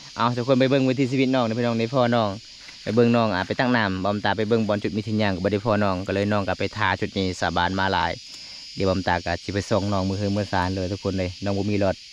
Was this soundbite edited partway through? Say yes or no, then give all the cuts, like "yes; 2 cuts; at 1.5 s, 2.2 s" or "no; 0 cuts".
no; 0 cuts